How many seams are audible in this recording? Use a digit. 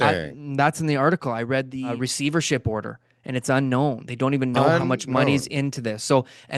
1